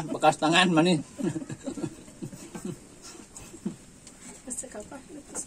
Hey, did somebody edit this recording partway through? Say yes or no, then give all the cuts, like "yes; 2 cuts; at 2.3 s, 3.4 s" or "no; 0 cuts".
no; 0 cuts